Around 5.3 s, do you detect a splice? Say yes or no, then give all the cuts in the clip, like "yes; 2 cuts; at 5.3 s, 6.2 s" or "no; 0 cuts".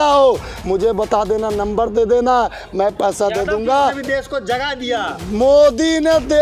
no; 1 cut; at 3.8 s